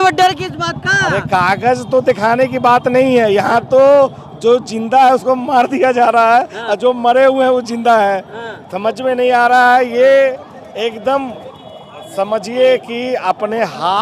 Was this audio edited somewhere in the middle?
no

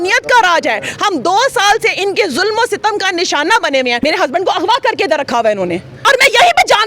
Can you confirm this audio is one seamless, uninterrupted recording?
no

